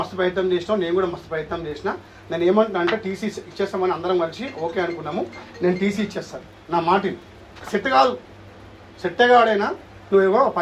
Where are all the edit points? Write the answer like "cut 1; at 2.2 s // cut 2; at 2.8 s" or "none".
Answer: none